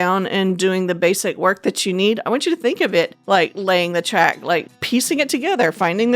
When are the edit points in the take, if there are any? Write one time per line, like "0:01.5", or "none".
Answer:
0:03.2